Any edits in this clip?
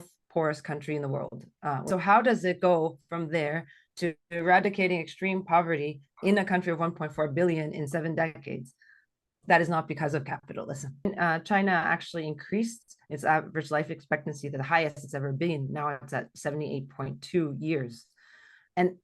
yes; 2 cuts; at 1.9 s, 11.1 s

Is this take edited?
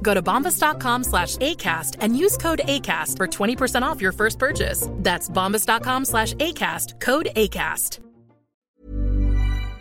yes; 1 cut; at 8.5 s

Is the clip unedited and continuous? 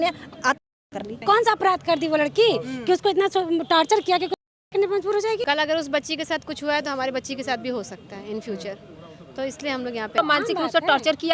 no; 3 cuts; at 1.2 s, 5.4 s, 10.2 s

